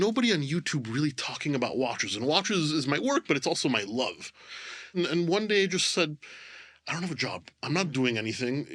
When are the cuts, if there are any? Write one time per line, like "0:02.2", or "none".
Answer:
0:04.9